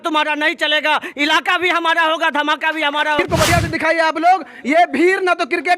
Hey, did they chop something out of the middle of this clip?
yes; 1 cut; at 3.2 s

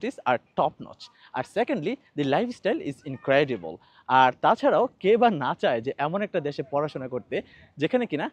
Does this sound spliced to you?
no; 0 cuts

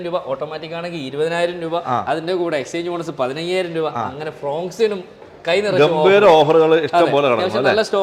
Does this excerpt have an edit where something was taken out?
no; 0 cuts

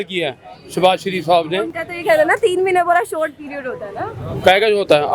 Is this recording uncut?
yes; 0 cuts

